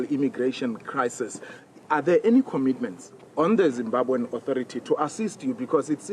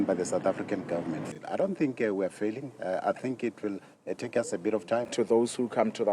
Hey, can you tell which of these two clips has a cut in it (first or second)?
second